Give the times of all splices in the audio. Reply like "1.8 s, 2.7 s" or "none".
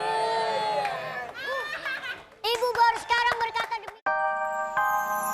3.8 s